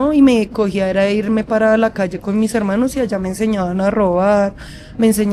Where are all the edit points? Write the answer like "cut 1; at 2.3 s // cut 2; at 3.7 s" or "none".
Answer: none